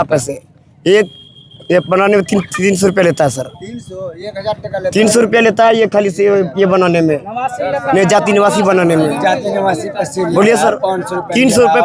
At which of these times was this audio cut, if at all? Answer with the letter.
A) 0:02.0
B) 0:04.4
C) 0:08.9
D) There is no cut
D